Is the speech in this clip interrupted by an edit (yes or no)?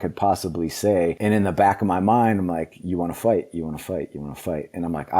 yes